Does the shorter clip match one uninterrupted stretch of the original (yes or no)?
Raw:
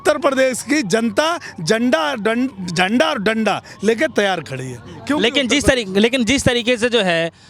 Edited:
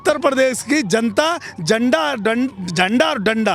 yes